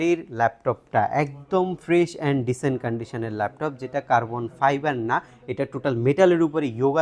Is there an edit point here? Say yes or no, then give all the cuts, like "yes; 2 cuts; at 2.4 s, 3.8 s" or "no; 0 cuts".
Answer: no; 0 cuts